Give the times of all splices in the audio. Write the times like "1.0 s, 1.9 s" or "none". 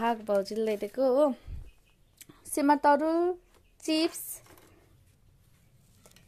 none